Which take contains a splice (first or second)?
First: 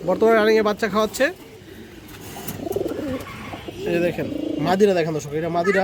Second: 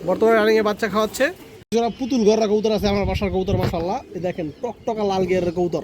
second